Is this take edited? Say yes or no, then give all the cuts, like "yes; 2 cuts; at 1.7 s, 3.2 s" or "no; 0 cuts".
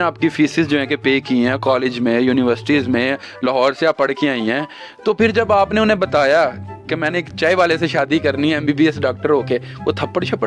no; 0 cuts